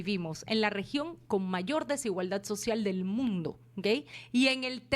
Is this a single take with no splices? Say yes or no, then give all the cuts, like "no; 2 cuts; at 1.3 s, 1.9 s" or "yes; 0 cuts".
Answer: no; 1 cut; at 4.0 s